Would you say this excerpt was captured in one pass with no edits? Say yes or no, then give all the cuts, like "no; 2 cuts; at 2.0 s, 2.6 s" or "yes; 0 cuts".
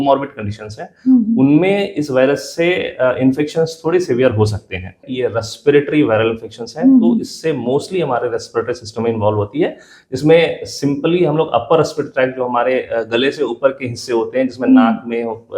no; 1 cut; at 5.0 s